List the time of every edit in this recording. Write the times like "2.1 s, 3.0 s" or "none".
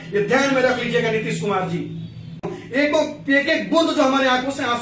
2.6 s